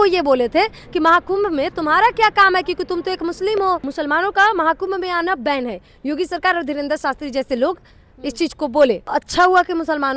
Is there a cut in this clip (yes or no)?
yes